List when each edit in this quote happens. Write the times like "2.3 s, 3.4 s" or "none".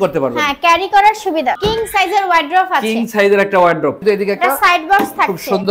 1.6 s, 4.0 s